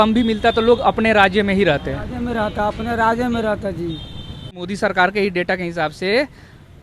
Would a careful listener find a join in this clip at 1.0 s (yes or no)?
no